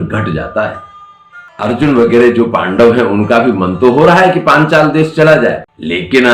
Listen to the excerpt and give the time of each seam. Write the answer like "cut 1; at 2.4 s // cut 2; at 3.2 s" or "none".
cut 1; at 1.5 s

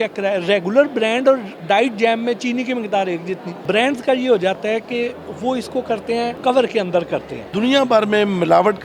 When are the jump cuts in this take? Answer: cut 1; at 3.5 s // cut 2; at 6.4 s // cut 3; at 7.4 s

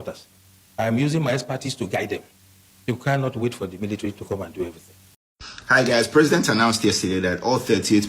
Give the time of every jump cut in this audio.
cut 1; at 5.0 s

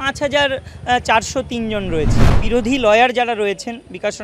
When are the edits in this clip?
cut 1; at 2.4 s

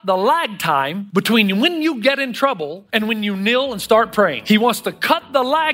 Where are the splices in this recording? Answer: cut 1; at 1.0 s // cut 2; at 2.8 s // cut 3; at 4.4 s

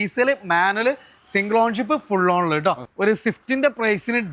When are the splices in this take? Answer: cut 1; at 2.9 s

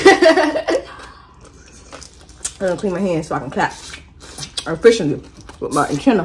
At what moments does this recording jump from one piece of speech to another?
none

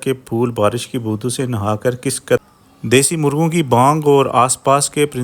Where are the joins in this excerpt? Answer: cut 1; at 2.4 s

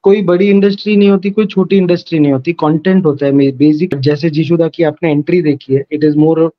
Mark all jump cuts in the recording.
cut 1; at 3.9 s

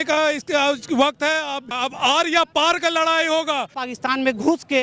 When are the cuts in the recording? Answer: cut 1; at 1.8 s // cut 2; at 3.8 s

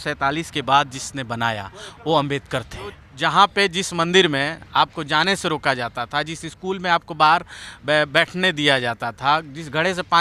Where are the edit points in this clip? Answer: cut 1; at 3.1 s

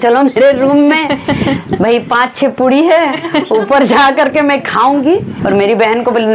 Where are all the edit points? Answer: cut 1; at 5.3 s

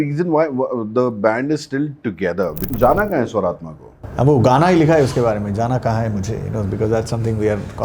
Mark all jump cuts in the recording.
cut 1; at 2.6 s

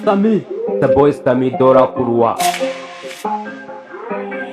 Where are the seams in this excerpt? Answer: cut 1; at 2.5 s

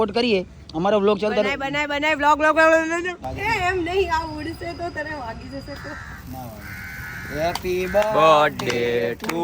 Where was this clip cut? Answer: cut 1; at 3.2 s

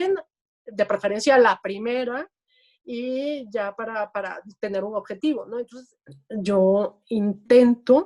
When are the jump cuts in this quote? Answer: cut 1; at 5.7 s

